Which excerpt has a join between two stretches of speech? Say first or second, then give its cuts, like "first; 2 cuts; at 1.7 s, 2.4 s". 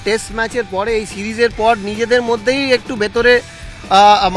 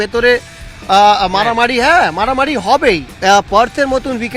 second; 1 cut; at 3.1 s